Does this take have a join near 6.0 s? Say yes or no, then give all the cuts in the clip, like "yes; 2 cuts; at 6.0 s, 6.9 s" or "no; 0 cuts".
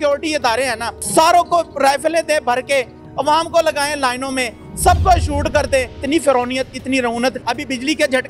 yes; 2 cuts; at 6.0 s, 7.4 s